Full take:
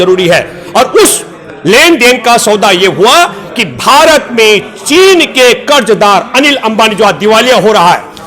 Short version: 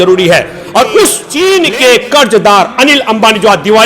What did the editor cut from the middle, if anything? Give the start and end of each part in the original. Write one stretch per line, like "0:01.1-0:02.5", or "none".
0:01.2-0:04.8